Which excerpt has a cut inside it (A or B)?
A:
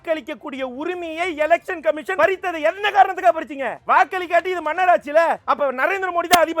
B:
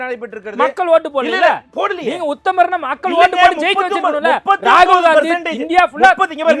A